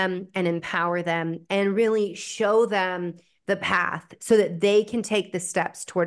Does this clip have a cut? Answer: no; 0 cuts

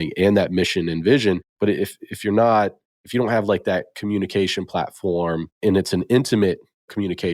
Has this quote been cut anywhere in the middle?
no; 0 cuts

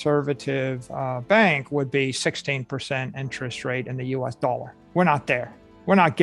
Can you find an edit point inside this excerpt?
yes; 1 cut; at 4.8 s

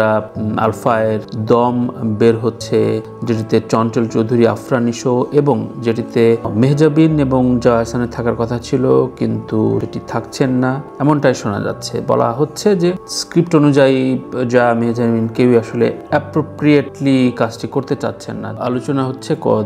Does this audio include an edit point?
yes; 1 cut; at 18.5 s

